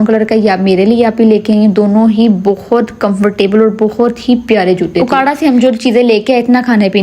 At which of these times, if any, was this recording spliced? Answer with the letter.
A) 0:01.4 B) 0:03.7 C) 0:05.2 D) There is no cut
C